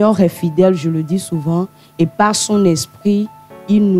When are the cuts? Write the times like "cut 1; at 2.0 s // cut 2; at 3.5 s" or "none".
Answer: none